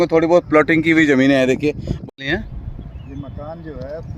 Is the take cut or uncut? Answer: cut